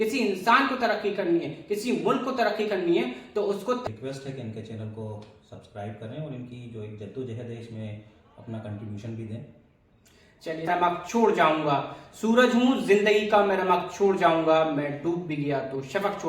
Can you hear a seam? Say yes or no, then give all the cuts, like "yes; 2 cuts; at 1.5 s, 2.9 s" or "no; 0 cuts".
yes; 2 cuts; at 3.8 s, 10.7 s